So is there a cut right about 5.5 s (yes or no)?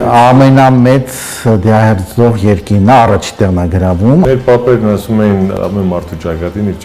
yes